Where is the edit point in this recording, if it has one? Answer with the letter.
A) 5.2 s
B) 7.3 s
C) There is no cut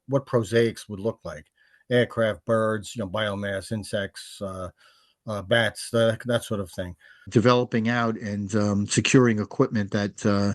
B